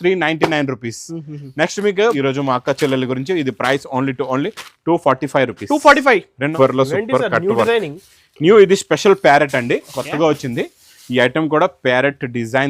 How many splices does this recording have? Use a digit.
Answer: 2